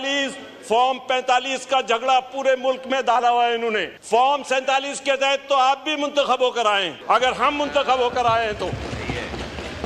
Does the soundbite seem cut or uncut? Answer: cut